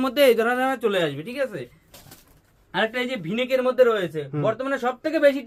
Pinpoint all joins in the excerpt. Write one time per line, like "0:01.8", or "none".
none